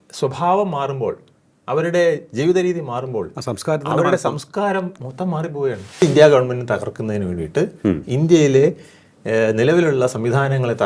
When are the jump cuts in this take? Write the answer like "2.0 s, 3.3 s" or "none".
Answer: 6.0 s